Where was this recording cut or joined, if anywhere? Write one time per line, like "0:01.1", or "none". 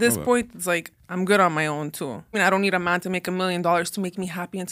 0:01.0
0:02.3